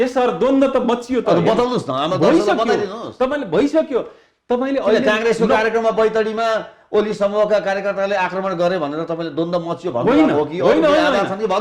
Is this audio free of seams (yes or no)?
yes